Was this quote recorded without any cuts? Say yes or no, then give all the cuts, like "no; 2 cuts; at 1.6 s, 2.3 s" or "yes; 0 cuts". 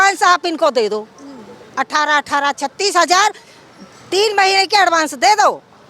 yes; 0 cuts